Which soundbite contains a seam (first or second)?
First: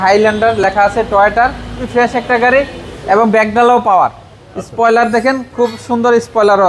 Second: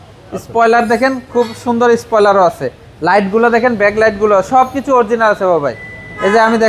first